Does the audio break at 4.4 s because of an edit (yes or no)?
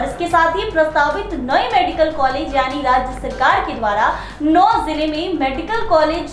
no